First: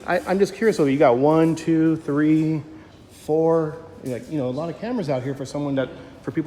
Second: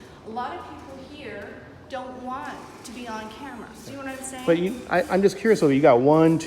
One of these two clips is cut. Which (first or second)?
second